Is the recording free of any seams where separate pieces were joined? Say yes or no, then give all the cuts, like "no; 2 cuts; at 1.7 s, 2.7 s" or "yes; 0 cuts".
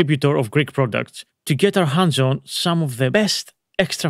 no; 1 cut; at 3.1 s